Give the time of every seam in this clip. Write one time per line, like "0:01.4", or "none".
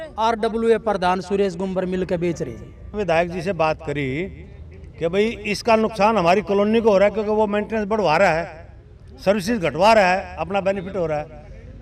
0:02.9